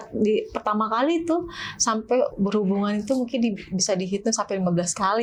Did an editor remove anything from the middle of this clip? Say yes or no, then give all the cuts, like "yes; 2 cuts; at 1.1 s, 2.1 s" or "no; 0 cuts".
no; 0 cuts